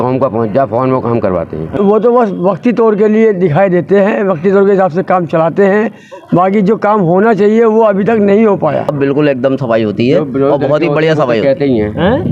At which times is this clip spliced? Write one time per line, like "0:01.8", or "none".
0:01.7
0:08.9